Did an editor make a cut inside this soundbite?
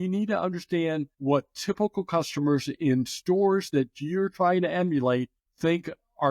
yes; 2 cuts; at 1.1 s, 5.4 s

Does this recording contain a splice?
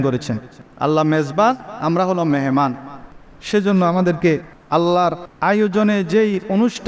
yes; 2 cuts; at 4.5 s, 5.3 s

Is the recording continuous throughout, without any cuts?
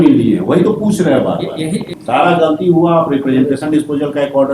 no; 1 cut; at 1.9 s

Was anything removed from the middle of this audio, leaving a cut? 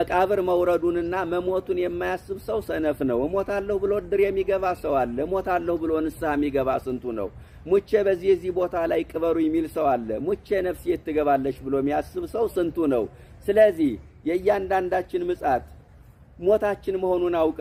no; 0 cuts

